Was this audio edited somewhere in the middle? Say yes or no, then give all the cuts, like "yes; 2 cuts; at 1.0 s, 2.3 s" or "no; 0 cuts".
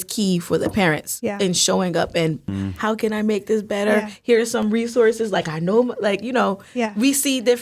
yes; 1 cut; at 2.5 s